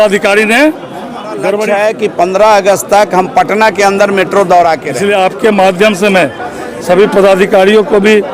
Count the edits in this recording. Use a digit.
2